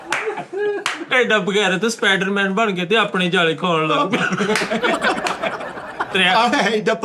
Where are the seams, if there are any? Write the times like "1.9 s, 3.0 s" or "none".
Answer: 1.0 s, 6.1 s